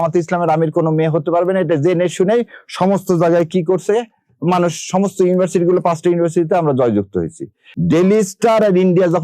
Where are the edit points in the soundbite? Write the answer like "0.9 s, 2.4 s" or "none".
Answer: 7.6 s